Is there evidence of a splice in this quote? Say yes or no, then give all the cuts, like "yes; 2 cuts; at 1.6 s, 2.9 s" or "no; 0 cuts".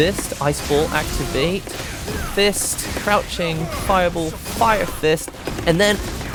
no; 0 cuts